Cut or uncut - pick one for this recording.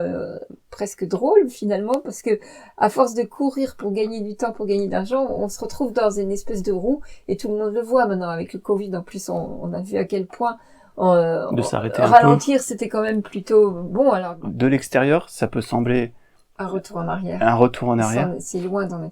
cut